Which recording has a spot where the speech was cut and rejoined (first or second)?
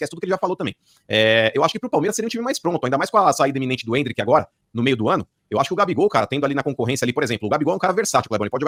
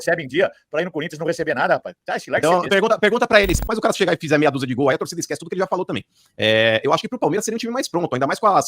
second